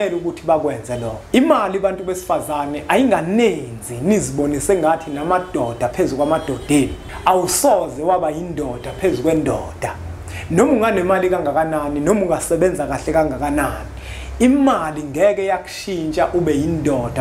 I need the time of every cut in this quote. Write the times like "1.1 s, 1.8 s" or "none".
1.1 s, 7.0 s